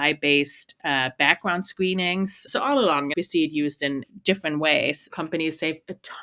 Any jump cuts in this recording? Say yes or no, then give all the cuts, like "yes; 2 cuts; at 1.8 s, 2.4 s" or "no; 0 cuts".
yes; 3 cuts; at 3.1 s, 4.1 s, 5.0 s